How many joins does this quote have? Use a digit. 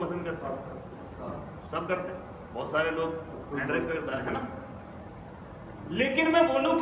0